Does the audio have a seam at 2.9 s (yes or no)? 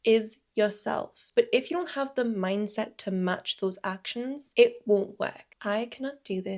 no